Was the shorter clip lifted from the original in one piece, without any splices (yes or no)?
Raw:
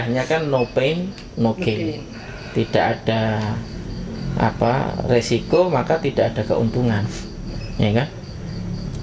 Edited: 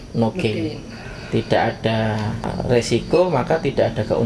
no